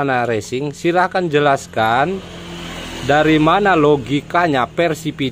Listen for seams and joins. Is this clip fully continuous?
yes; 0 cuts

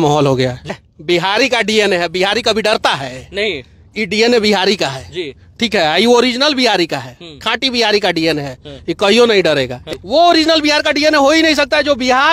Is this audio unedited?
no; 2 cuts; at 0.7 s, 9.8 s

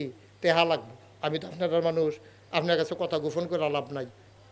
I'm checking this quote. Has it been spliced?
no; 0 cuts

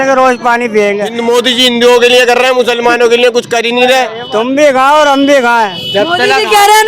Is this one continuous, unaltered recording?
no; 2 cuts; at 1.1 s, 4.2 s

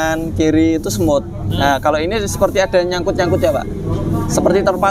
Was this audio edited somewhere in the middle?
no; 0 cuts

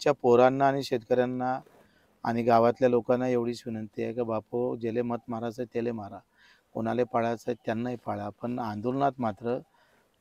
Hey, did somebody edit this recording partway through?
no; 0 cuts

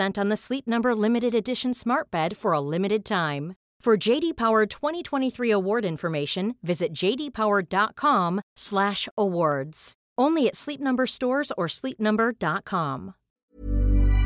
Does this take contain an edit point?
yes; 1 cut; at 13.3 s

